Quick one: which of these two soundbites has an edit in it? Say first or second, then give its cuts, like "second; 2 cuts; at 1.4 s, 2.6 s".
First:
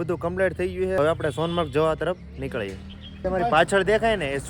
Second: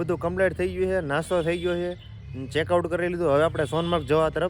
first; 2 cuts; at 1.0 s, 3.2 s